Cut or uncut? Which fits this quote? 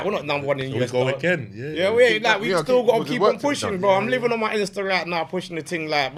uncut